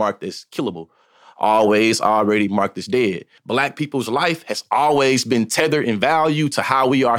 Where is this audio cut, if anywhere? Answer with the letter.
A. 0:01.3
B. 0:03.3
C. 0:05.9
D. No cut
B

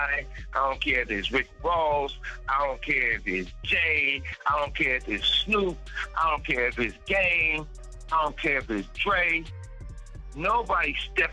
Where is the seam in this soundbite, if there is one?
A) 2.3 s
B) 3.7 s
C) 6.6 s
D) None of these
D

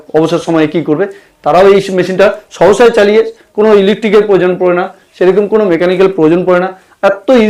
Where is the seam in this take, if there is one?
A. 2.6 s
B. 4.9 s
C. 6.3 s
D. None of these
D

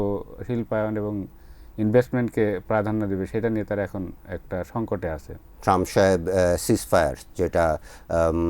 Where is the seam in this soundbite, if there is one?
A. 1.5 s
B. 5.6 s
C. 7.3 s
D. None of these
B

